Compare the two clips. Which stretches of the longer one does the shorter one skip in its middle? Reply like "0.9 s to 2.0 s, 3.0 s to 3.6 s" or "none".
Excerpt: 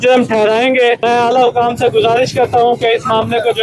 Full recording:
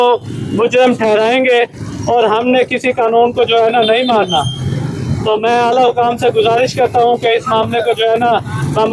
1.7 s to 5.4 s